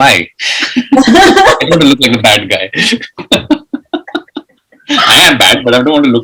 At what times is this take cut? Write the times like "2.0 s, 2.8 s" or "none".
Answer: none